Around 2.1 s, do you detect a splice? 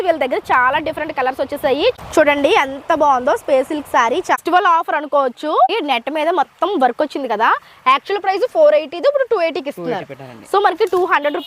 yes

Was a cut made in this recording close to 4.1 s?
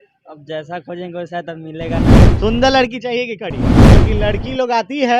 yes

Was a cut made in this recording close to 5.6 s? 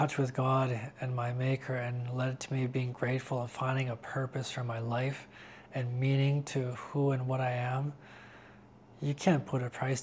no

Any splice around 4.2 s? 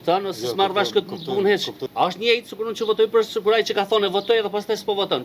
no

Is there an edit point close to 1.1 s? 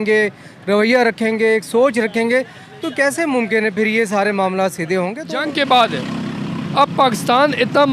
no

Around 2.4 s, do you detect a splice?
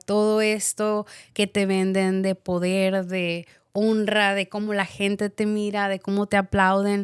no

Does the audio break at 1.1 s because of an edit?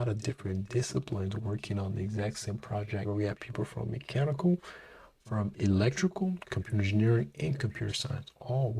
no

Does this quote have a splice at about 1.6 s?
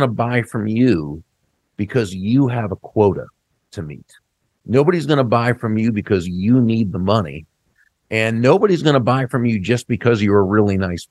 no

